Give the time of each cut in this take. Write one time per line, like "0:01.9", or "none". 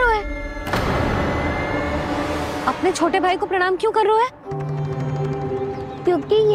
none